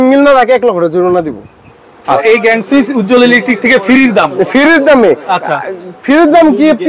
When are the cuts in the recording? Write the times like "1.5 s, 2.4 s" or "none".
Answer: 2.2 s